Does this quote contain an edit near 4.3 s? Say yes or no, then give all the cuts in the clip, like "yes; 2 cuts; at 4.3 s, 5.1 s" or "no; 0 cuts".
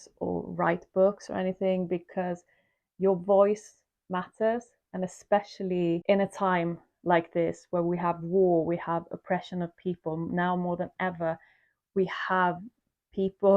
no; 1 cut; at 6.0 s